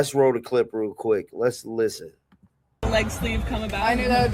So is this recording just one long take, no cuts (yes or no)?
yes